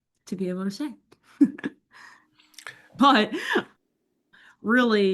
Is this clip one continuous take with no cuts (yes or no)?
no